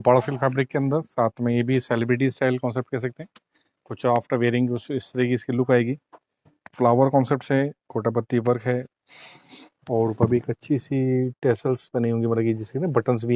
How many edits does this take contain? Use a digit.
0